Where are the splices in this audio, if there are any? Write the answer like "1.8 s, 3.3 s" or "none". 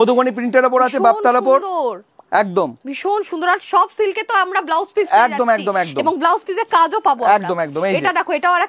none

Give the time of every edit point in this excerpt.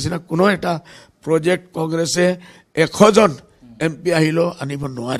none

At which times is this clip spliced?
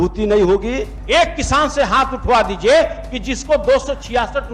0.9 s

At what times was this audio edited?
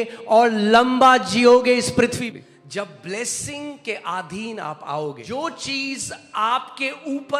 2.2 s, 5.2 s

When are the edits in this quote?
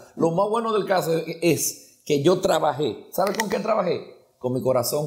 none

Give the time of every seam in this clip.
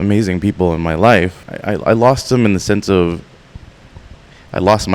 1.4 s

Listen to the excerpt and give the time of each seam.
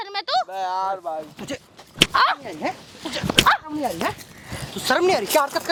none

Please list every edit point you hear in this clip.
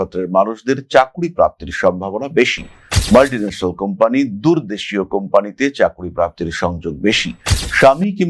none

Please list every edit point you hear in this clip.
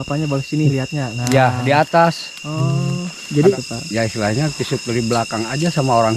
3.6 s

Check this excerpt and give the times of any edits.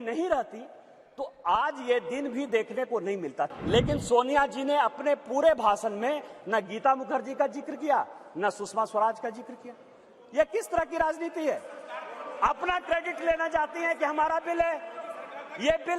3.5 s

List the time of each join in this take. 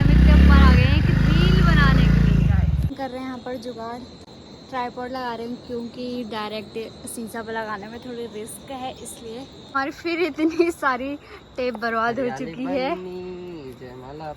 2.9 s, 9.6 s

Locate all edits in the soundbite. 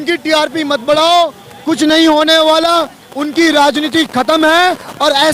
none

